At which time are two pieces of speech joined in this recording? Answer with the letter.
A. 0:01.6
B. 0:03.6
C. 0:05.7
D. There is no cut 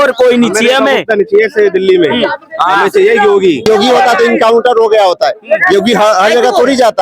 B